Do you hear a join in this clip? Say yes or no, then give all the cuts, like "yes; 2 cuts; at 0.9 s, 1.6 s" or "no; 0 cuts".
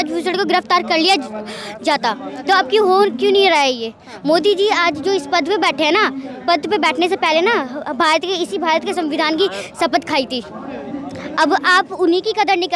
no; 0 cuts